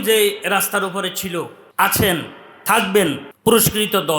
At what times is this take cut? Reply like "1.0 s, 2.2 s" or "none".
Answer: 1.6 s, 3.3 s